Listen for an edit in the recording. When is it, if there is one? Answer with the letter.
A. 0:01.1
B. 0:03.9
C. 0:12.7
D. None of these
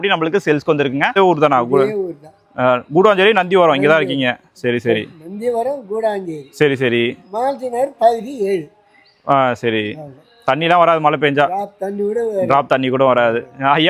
A